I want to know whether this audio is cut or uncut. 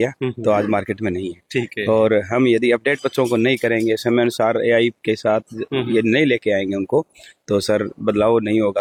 uncut